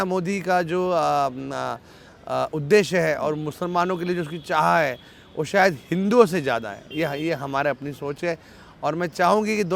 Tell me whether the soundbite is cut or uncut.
uncut